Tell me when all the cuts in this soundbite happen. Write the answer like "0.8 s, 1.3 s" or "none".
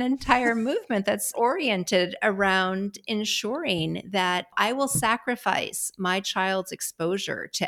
1.3 s, 4.5 s